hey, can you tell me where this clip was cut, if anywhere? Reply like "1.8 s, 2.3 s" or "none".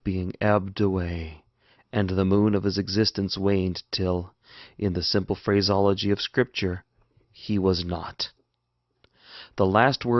3.8 s